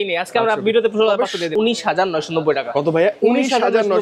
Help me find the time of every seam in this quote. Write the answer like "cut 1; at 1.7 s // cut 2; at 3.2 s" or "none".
cut 1; at 1.6 s